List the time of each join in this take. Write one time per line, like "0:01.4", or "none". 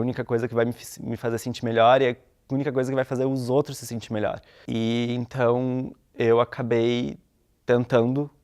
0:04.5

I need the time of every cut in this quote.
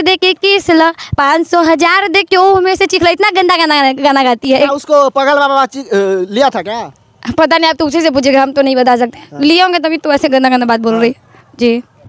none

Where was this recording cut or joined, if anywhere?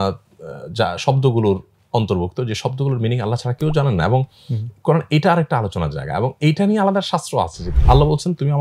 0:07.7

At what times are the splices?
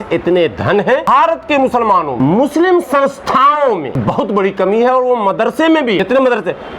0:01.1
0:02.1
0:04.0
0:06.0

